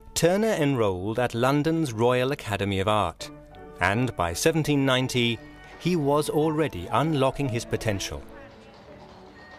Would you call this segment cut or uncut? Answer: uncut